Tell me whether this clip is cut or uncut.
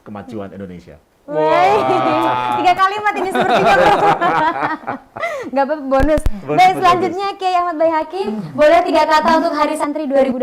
uncut